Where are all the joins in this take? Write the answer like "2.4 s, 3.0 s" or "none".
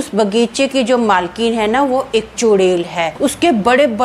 3.1 s